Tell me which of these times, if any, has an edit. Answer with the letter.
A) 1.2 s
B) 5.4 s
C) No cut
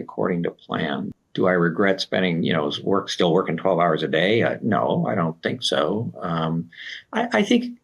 A